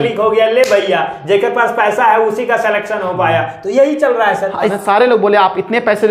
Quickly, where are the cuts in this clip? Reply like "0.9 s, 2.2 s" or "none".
4.7 s

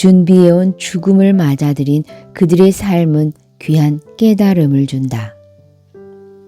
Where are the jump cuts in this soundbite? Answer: 5.4 s

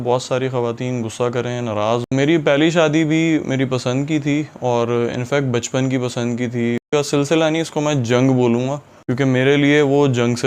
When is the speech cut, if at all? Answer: 2.1 s, 6.8 s

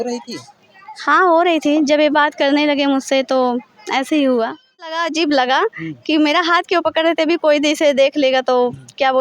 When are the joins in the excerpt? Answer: 4.8 s

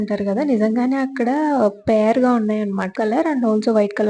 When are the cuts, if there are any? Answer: 3.0 s

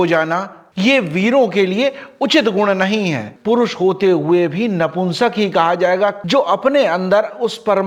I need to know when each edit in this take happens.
3.3 s, 6.2 s

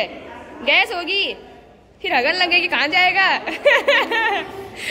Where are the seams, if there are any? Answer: none

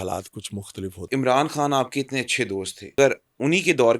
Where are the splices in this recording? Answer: 1.1 s, 2.9 s

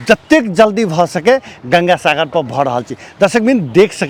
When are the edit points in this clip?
none

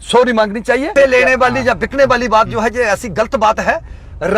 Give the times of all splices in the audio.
0.9 s

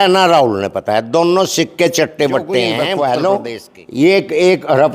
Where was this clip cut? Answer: 2.8 s

